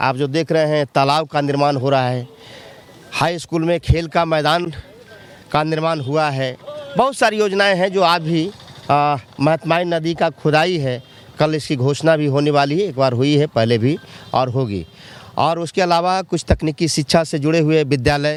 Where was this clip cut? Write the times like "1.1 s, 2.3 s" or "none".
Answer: none